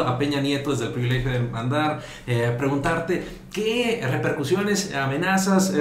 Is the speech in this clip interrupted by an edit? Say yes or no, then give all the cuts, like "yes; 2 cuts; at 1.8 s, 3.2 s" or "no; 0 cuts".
no; 0 cuts